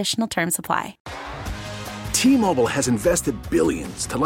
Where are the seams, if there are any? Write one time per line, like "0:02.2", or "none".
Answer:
0:01.0

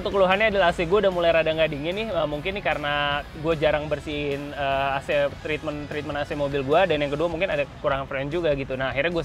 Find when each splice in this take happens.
none

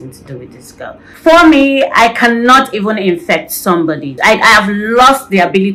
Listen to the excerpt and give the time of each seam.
0:01.1
0:04.1

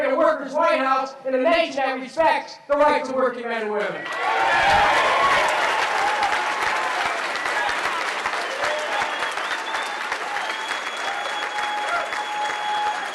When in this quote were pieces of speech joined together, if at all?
0:10.4

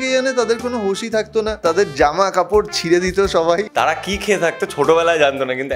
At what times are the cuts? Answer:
0:01.6
0:03.7

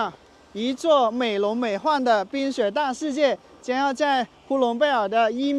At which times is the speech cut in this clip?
none

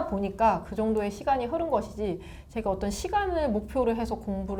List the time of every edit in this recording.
none

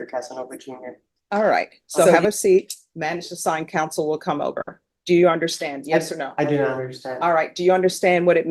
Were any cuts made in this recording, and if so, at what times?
0:02.1

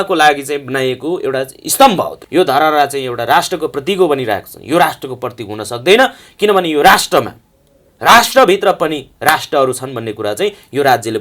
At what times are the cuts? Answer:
0:02.2

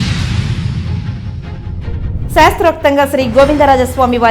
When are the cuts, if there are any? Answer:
0:02.2

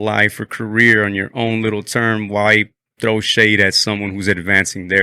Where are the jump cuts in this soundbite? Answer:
none

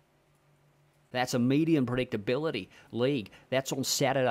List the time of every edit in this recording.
0:01.0

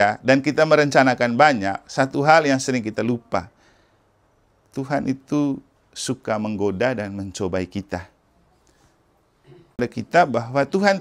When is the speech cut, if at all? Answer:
0:09.9

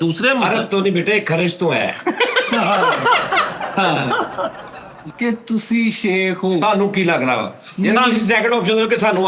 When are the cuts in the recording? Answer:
0:05.0

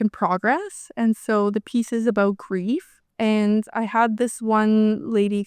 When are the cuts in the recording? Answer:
0:03.0

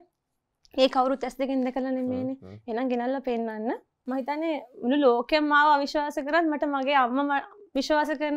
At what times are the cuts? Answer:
0:03.9

